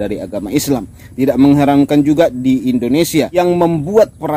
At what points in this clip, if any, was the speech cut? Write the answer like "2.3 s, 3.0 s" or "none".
1.0 s, 3.4 s